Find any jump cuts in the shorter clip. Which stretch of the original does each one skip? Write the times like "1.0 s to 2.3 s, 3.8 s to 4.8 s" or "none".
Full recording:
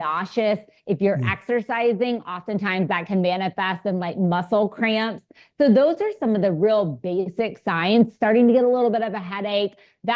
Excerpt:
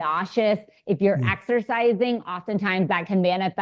none